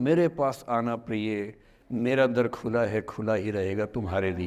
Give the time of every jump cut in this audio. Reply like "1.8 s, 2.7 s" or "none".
none